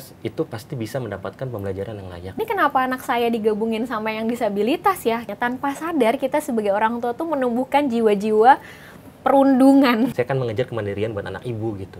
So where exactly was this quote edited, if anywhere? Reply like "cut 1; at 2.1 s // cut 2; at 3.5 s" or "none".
cut 1; at 2.4 s // cut 2; at 5.3 s // cut 3; at 10.2 s